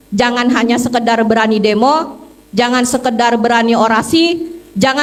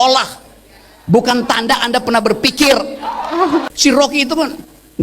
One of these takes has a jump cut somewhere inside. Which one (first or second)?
second